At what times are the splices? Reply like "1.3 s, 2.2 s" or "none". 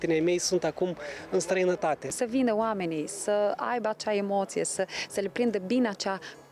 2.1 s